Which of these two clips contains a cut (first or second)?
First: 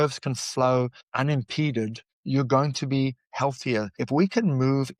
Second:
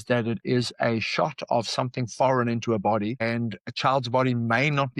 first